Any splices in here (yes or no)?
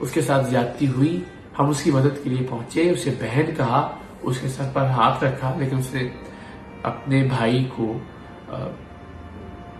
no